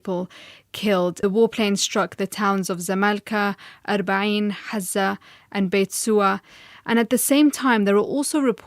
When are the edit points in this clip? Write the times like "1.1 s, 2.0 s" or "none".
1.2 s

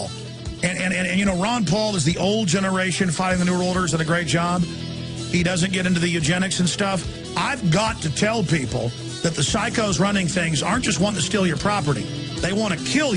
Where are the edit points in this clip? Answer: none

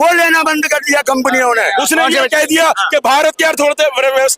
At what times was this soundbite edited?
1.8 s

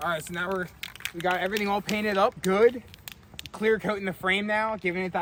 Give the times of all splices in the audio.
none

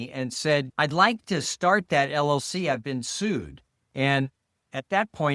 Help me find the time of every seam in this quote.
none

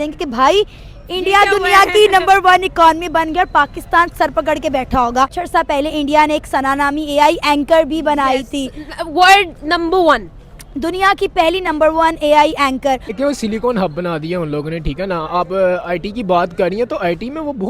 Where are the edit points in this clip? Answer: 5.4 s, 13.2 s

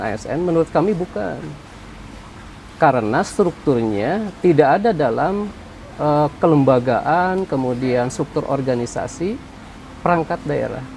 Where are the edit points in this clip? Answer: none

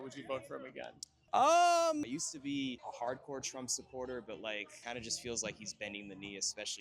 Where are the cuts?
2.1 s, 4.7 s

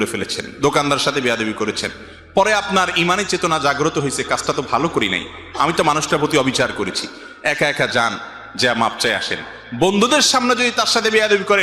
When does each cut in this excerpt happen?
none

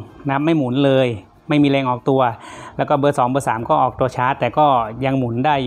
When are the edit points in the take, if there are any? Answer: none

